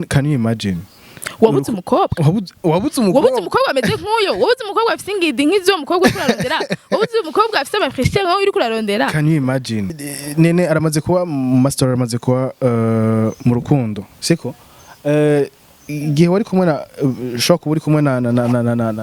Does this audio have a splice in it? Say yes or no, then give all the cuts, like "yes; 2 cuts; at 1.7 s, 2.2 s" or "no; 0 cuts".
yes; 1 cut; at 9.9 s